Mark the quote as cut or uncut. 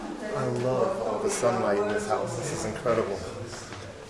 uncut